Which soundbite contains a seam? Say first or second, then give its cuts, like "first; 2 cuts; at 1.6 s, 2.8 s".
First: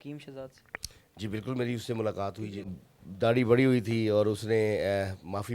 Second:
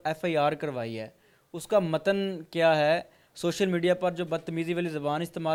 first; 1 cut; at 2.8 s